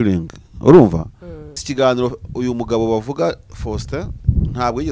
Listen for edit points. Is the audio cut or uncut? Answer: cut